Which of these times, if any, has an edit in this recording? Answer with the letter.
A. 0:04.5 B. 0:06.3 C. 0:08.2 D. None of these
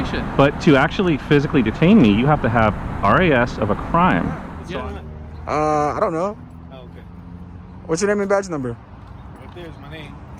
A